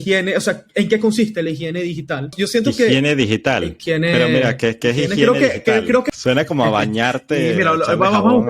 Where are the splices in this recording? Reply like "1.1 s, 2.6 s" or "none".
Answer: 2.3 s, 3.7 s, 6.1 s